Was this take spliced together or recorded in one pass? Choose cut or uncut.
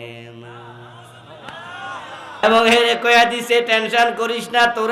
cut